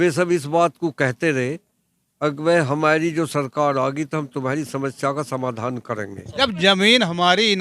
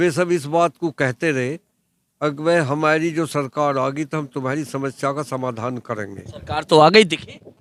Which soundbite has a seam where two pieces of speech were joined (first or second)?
first